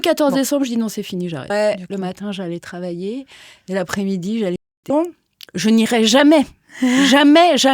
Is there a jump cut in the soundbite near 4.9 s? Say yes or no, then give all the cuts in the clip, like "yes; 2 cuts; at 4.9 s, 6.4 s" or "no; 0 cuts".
yes; 2 cuts; at 1.5 s, 4.9 s